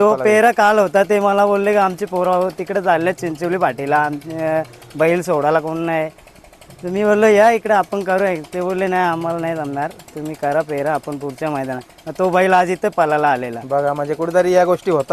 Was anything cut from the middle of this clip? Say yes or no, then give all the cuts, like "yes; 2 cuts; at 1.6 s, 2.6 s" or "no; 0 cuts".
no; 0 cuts